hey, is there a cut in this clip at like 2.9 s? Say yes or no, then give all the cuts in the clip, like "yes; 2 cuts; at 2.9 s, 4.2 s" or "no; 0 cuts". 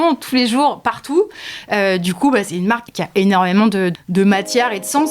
yes; 2 cuts; at 2.9 s, 3.9 s